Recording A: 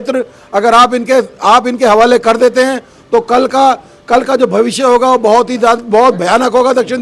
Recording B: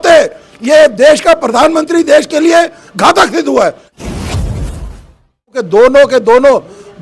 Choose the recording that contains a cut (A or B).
B